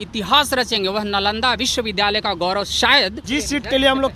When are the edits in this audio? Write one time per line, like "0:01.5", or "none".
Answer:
0:03.2